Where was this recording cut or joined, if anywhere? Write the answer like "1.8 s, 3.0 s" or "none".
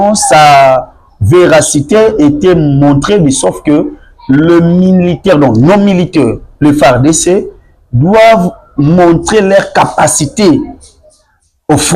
none